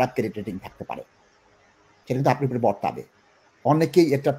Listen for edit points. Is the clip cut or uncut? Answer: uncut